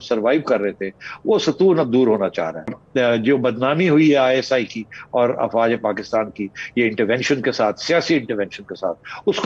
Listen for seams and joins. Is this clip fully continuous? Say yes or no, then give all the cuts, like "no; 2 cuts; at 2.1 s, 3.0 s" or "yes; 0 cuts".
no; 1 cut; at 2.8 s